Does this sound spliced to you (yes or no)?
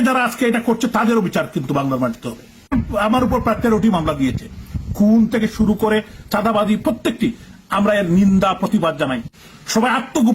yes